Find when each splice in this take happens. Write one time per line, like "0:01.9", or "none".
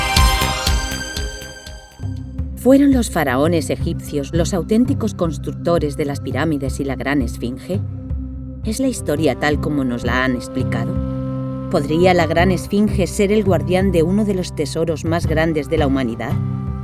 0:02.0